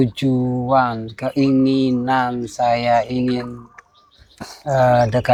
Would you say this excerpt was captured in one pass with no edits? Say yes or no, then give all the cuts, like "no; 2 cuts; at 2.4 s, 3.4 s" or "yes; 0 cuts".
yes; 0 cuts